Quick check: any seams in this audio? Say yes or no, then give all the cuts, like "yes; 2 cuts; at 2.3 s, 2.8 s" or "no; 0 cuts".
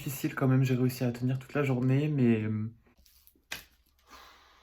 yes; 1 cut; at 3.2 s